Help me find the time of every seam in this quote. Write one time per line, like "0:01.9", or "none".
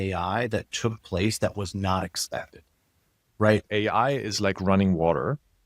0:03.6